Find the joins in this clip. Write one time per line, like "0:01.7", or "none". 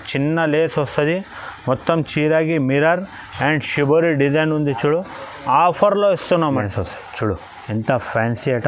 0:06.6

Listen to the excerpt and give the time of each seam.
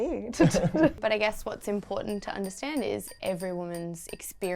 0:01.0

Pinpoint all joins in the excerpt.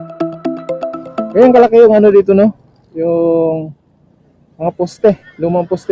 0:01.3

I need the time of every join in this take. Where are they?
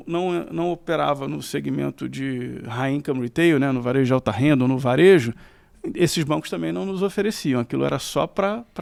none

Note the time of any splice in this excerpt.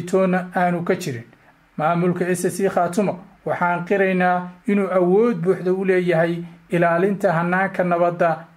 0:01.5

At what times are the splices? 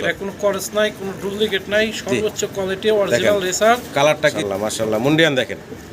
0:04.4

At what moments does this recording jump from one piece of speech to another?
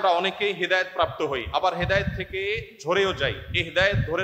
none

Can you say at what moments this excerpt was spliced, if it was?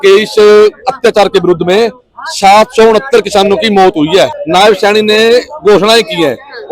0:04.4

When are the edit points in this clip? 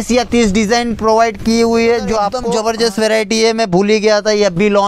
0:02.4

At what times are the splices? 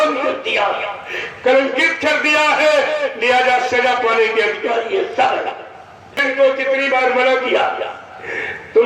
0:06.2

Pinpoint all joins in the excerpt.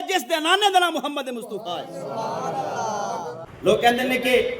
0:03.5

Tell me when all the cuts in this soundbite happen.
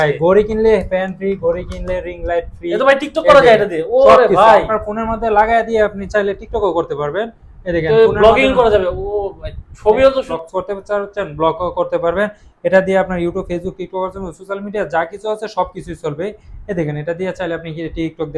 0:10.3

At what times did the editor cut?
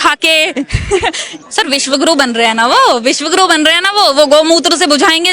0:01.3

